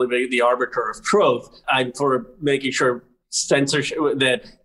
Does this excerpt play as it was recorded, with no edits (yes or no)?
no